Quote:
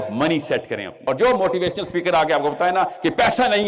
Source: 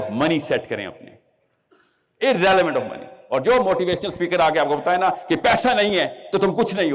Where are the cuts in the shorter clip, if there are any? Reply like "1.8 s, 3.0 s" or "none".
0.9 s